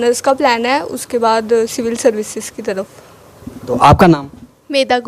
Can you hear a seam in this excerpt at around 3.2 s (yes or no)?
no